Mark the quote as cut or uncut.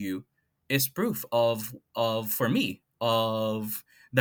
uncut